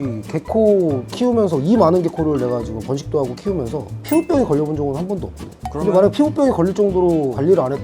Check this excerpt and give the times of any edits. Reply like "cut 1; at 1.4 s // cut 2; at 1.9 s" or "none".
none